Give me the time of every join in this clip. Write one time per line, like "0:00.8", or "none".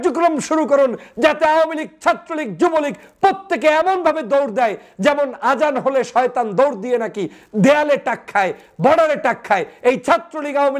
none